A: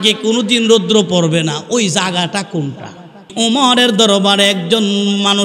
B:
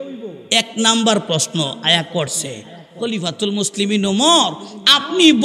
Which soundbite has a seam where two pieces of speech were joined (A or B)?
A